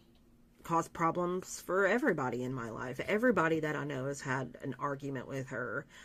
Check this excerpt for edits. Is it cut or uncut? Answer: uncut